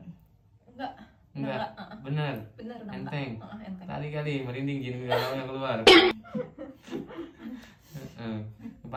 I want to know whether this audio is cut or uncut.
uncut